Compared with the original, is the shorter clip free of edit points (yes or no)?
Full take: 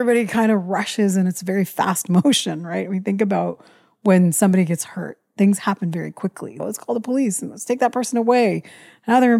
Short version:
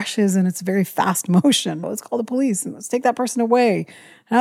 no